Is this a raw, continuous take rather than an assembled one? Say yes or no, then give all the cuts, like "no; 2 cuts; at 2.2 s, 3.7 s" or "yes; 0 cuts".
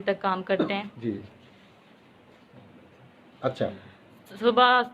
yes; 0 cuts